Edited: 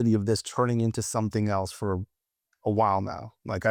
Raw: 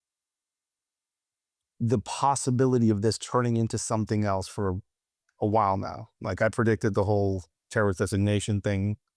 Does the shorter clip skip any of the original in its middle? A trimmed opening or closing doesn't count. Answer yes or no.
no